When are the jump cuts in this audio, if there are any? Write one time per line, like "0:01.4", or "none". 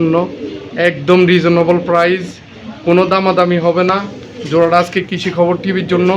none